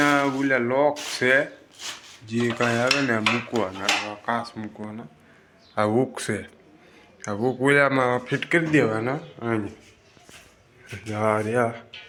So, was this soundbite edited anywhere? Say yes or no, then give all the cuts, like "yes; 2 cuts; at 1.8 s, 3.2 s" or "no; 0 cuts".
no; 0 cuts